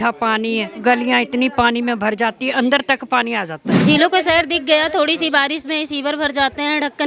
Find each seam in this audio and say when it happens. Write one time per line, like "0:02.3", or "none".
0:03.7